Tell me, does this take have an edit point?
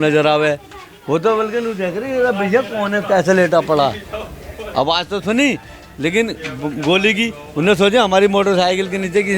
no; 0 cuts

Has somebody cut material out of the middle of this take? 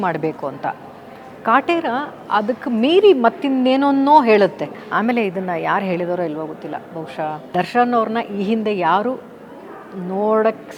yes; 2 cuts; at 4.7 s, 7.5 s

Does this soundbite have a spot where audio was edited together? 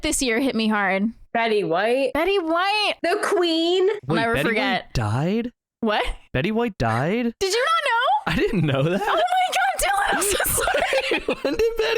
yes; 4 cuts; at 1.2 s, 2.1 s, 3.0 s, 4.0 s

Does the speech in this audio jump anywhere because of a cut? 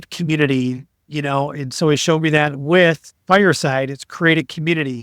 no; 0 cuts

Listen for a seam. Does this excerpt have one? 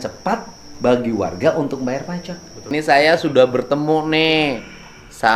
yes; 1 cut; at 2.6 s

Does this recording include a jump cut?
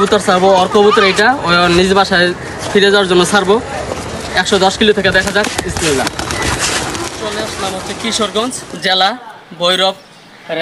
yes; 1 cut; at 7.5 s

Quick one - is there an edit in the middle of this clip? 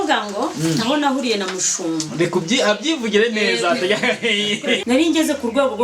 yes; 1 cut; at 4.8 s

